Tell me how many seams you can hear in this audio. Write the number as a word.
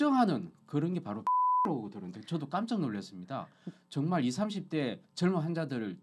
zero